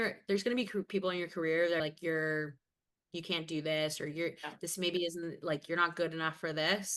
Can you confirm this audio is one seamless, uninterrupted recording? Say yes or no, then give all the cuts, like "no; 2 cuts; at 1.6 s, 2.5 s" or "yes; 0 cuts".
no; 1 cut; at 1.8 s